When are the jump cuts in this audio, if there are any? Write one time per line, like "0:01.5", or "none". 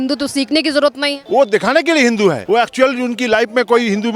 0:01.1
0:02.4